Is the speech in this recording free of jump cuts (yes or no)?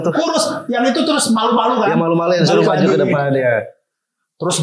yes